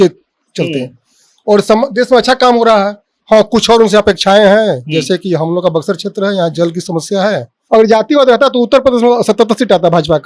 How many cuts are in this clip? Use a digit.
1